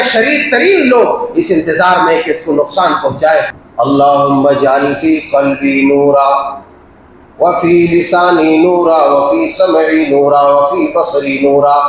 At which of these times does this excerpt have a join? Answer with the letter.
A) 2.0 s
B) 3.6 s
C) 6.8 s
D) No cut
B